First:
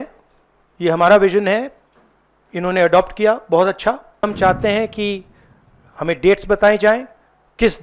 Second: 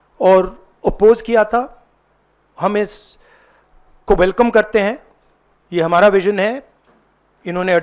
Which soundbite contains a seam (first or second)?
first